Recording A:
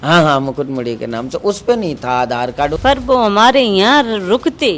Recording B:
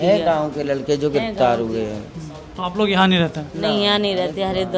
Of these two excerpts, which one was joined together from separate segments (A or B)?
A